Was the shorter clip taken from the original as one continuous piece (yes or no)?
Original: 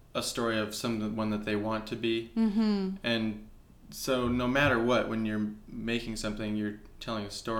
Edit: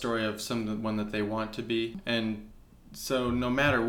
no